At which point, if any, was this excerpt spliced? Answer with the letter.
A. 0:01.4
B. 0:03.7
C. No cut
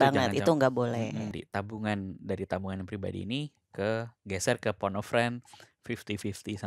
A